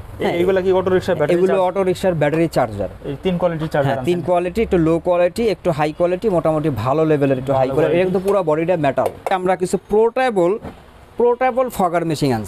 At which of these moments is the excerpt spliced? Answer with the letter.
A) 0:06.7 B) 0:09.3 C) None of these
B